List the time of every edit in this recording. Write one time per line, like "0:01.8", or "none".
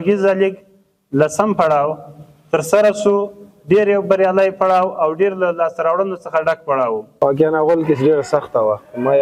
0:07.1